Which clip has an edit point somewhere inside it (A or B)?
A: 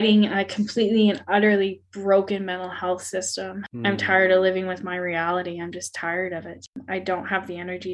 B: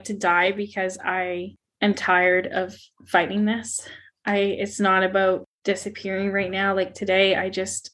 A